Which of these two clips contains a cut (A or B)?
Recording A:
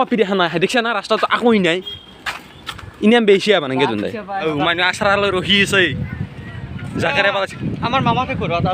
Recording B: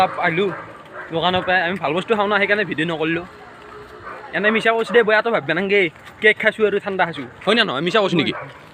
A